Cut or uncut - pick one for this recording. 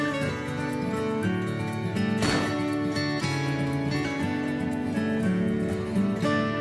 uncut